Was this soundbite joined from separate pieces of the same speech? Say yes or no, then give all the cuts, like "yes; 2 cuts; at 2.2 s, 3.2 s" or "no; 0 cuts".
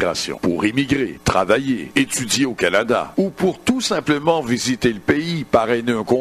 no; 0 cuts